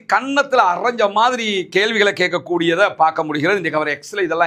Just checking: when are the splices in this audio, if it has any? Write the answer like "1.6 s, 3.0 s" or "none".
none